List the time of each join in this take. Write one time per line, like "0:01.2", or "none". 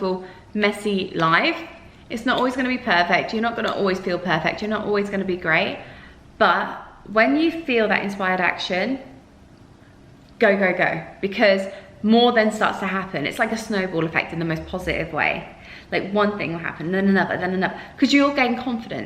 none